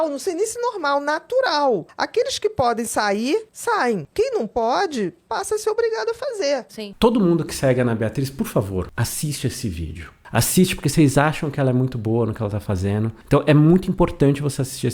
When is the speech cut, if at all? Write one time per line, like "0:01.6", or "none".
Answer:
0:02.0
0:03.7
0:06.9